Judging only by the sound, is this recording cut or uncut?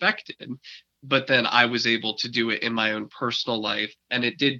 uncut